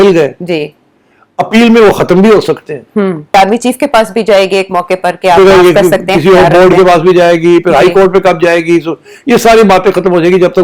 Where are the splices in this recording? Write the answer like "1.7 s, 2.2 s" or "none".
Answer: 3.3 s